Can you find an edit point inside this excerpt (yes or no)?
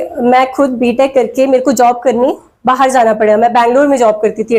no